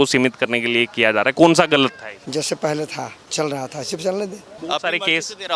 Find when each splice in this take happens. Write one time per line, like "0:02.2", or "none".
0:02.1
0:03.2
0:04.5